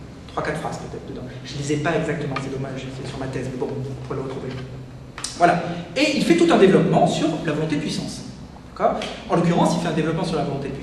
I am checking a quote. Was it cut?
yes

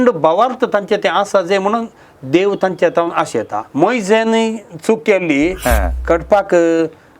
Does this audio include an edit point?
yes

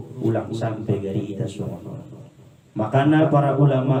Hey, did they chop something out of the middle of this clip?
no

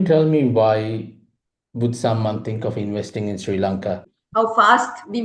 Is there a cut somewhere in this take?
yes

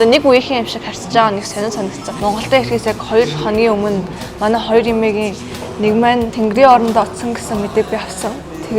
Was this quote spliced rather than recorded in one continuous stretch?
yes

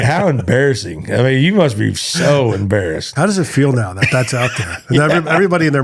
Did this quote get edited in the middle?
no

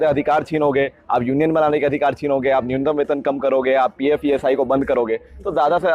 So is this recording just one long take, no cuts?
yes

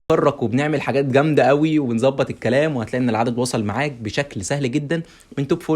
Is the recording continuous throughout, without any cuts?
yes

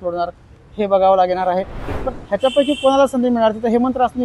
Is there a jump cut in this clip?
yes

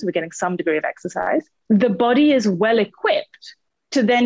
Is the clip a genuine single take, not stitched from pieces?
no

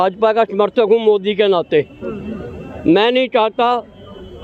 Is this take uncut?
yes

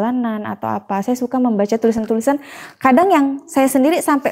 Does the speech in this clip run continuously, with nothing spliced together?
yes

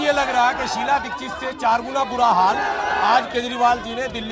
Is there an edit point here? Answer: no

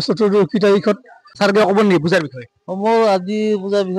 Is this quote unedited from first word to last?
no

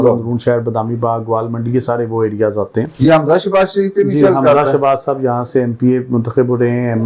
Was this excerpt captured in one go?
yes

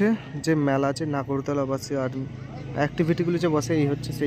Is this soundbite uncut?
yes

